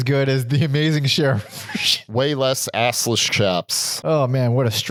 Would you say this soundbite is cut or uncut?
uncut